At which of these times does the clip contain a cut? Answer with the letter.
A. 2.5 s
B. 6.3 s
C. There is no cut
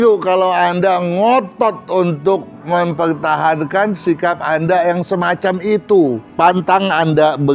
B